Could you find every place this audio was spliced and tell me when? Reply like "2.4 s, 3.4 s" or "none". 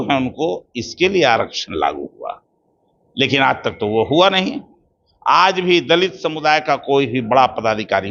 none